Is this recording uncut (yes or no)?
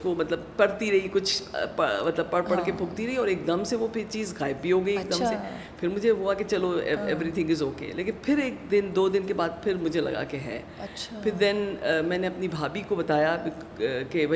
yes